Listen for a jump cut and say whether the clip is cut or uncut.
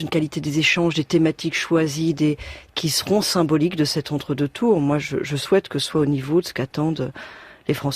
cut